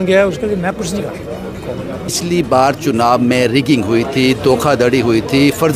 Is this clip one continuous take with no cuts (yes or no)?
no